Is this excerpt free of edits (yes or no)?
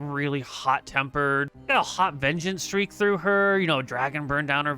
no